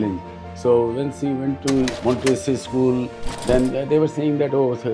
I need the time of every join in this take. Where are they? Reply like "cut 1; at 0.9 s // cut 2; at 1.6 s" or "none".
cut 1; at 2.0 s